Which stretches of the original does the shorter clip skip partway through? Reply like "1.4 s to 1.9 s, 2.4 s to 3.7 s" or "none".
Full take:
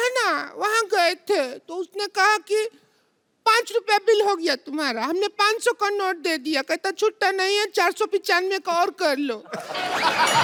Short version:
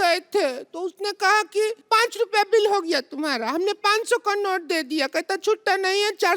2.7 s to 3.3 s